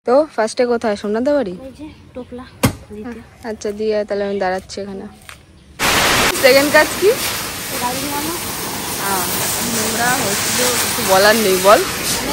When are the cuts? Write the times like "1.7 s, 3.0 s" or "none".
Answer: none